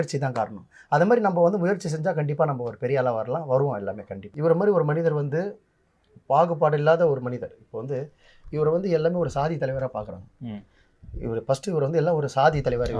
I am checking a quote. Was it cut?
yes; 1 cut; at 4.2 s

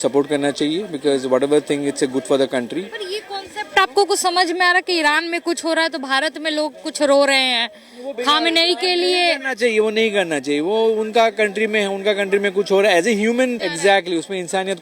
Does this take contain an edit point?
yes; 1 cut; at 13.7 s

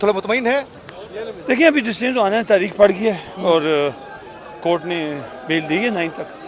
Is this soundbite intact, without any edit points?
yes; 0 cuts

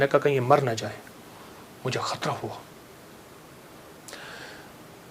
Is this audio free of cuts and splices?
yes; 0 cuts

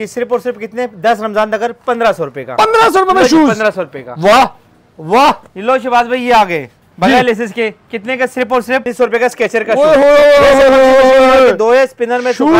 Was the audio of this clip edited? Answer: yes; 1 cut; at 8.9 s

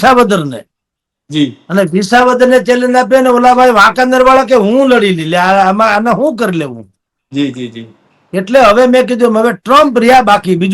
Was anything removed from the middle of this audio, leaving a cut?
no; 0 cuts

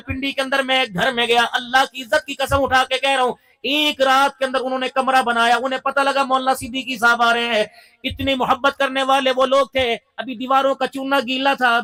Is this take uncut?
yes; 0 cuts

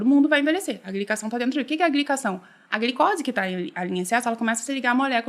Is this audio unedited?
yes; 0 cuts

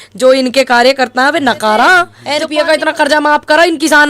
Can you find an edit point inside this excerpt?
yes; 1 cut; at 2.2 s

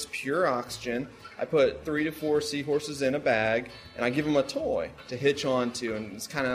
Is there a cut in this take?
yes; 2 cuts; at 1.8 s, 5.0 s

